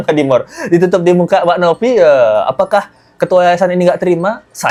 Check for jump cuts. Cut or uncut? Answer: uncut